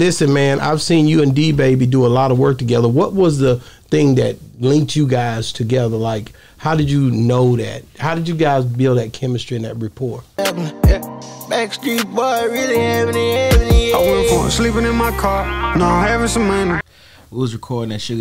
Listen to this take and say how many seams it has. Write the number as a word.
zero